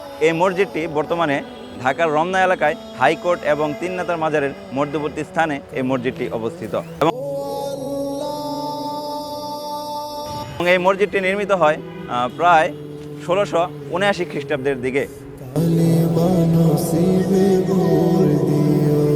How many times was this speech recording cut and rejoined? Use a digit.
2